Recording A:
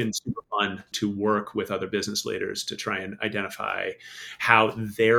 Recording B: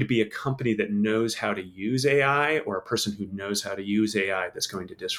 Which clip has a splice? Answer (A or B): A